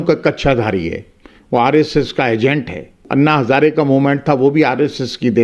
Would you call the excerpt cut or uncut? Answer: cut